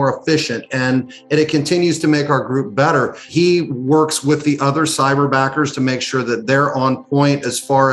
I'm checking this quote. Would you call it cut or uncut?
cut